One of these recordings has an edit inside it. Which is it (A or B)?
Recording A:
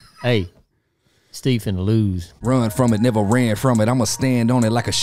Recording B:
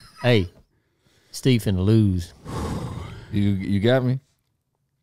A